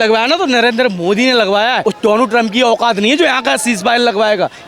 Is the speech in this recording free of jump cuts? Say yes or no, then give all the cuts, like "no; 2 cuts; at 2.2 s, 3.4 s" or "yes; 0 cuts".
no; 1 cut; at 1.8 s